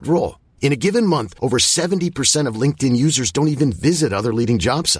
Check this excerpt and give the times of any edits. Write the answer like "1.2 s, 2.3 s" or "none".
none

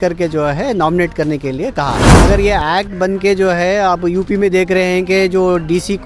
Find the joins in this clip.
2.1 s

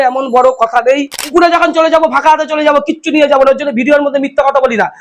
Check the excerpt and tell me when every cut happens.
1.3 s

